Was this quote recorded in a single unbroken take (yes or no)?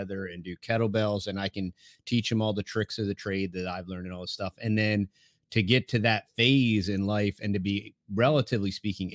yes